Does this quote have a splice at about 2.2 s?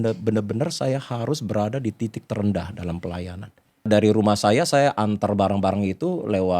no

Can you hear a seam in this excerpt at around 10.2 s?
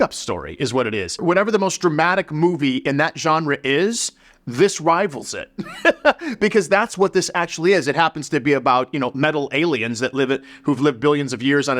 no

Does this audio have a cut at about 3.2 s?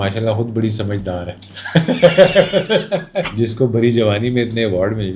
yes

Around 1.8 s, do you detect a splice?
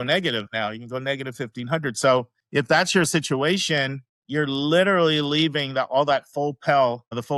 no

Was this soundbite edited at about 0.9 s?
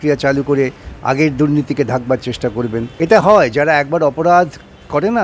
no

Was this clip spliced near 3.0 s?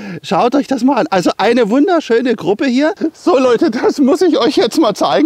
yes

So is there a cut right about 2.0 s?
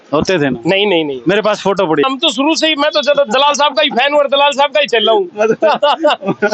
yes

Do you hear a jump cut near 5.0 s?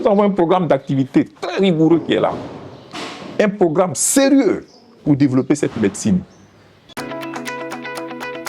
no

